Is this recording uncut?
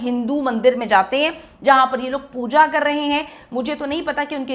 yes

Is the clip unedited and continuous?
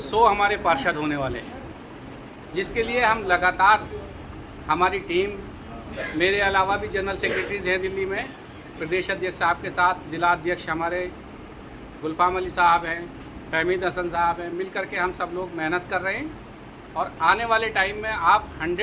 yes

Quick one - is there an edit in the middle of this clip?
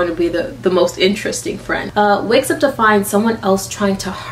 yes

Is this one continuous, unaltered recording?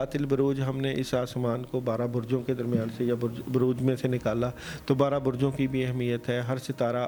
yes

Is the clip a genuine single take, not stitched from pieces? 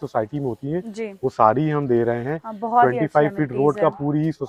yes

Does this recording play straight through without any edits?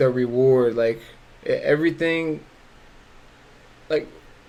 yes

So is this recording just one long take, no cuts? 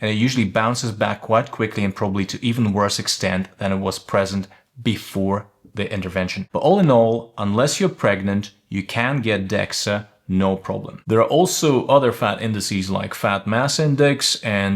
no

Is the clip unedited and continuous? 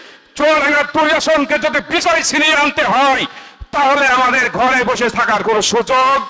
yes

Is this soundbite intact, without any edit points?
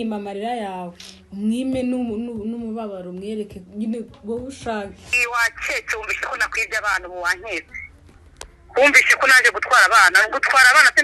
no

